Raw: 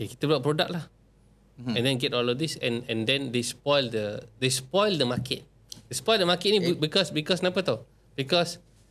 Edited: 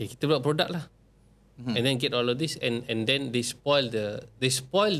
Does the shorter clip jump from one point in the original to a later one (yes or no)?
no